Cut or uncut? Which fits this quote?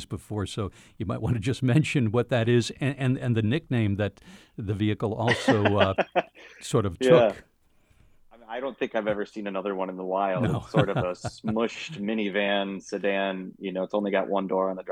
uncut